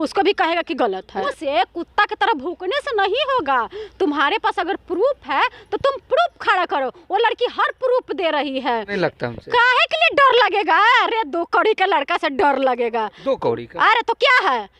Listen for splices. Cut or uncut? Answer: cut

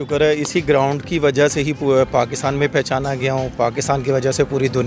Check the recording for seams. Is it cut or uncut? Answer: uncut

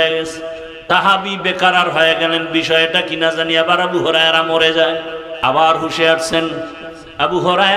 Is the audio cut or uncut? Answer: cut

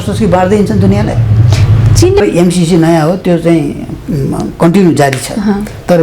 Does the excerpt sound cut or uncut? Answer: cut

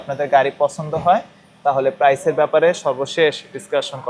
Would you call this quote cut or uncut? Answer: uncut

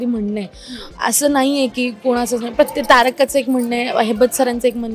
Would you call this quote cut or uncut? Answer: uncut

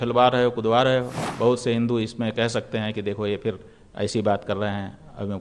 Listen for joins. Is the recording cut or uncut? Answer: cut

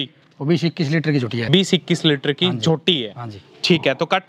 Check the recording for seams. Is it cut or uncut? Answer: cut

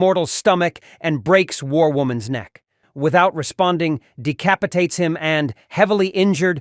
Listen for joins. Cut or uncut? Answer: cut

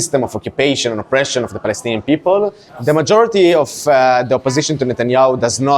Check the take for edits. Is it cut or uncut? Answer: cut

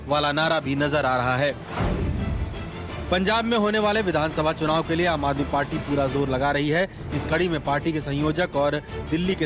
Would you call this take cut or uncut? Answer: uncut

